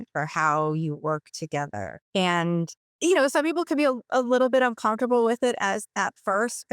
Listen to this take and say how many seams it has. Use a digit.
2